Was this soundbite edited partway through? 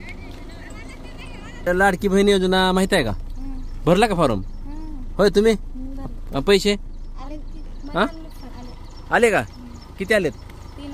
no; 0 cuts

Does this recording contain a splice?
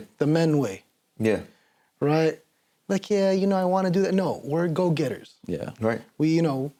no; 0 cuts

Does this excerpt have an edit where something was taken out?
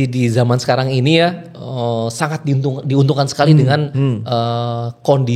no; 0 cuts

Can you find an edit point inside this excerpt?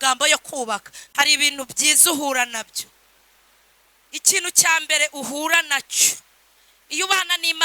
yes; 1 cut; at 1.0 s

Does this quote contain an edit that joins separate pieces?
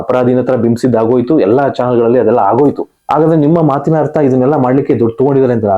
yes; 1 cut; at 2.9 s

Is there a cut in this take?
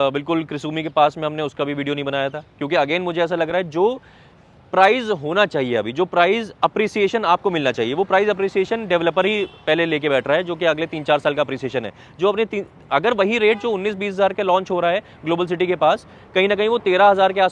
no; 0 cuts

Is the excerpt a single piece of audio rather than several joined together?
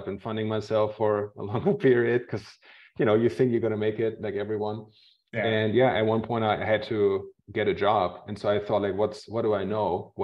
yes; 0 cuts

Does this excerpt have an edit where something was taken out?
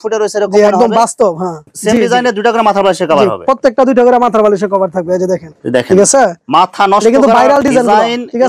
no; 0 cuts

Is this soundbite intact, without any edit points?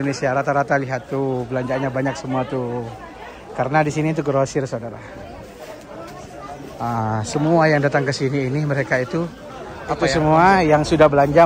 no; 1 cut; at 10.1 s

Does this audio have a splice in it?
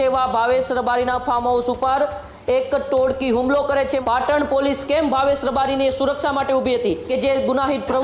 yes; 2 cuts; at 4.0 s, 7.0 s

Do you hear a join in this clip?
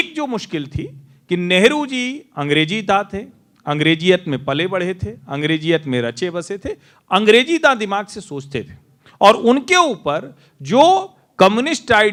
no; 0 cuts

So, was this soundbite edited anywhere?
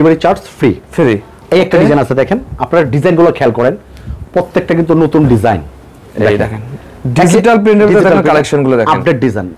no; 0 cuts

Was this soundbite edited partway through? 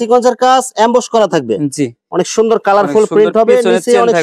yes; 1 cut; at 2.0 s

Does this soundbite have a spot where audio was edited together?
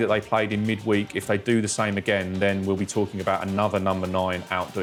no; 0 cuts

